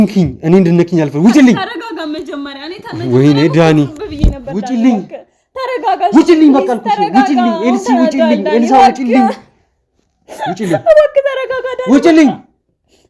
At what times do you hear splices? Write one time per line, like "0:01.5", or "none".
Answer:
none